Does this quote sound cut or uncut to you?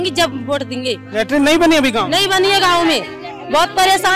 uncut